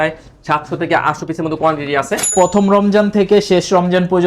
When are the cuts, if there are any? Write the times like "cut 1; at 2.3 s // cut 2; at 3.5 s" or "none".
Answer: cut 1; at 2.3 s